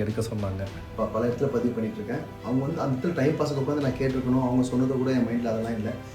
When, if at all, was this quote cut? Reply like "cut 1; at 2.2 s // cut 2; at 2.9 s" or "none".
cut 1; at 0.9 s

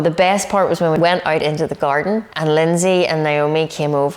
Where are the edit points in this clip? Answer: cut 1; at 1.0 s // cut 2; at 2.3 s

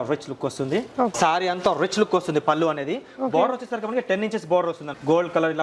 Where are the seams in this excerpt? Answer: cut 1; at 1.1 s

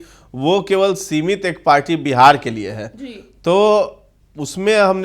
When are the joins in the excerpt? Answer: none

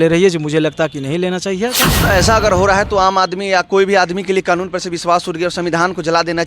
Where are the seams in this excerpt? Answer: cut 1; at 2.0 s

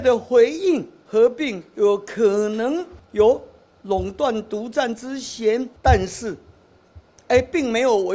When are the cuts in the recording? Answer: cut 1; at 1.0 s // cut 2; at 3.0 s // cut 3; at 5.7 s

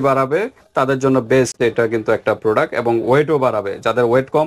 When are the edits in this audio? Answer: none

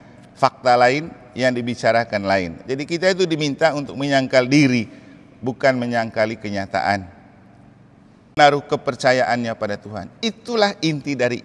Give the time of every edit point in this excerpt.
cut 1; at 8.4 s

